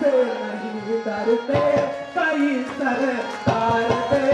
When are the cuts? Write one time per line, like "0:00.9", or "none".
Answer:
none

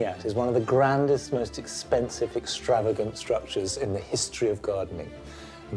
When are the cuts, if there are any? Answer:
none

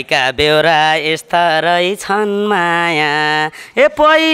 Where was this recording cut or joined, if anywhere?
none

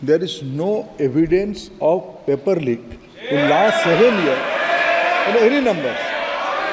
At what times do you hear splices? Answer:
none

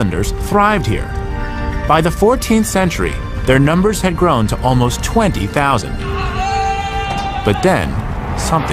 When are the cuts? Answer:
0:04.7

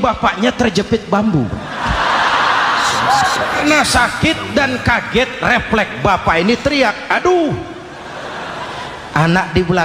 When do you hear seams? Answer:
0:03.6

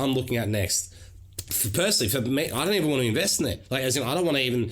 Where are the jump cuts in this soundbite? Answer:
none

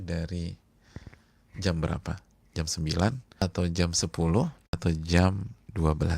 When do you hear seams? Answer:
0:03.4
0:04.8

